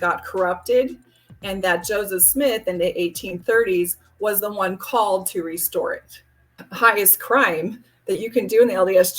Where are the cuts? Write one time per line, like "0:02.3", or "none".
0:06.6